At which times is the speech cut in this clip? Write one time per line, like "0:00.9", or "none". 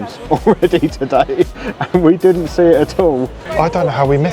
0:03.4